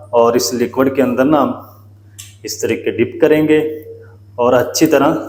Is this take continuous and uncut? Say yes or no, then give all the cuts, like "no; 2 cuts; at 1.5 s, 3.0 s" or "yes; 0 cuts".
yes; 0 cuts